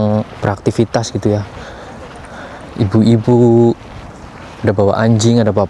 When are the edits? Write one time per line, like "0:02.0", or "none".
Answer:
none